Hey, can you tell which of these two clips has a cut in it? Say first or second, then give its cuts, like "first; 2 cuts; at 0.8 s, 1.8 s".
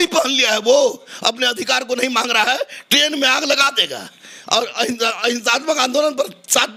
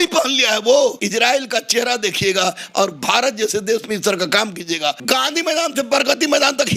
second; 2 cuts; at 1.0 s, 5.0 s